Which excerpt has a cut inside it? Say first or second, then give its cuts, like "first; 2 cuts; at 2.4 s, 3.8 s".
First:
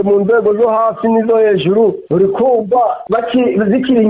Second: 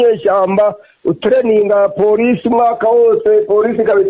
first; 2 cuts; at 2.1 s, 3.0 s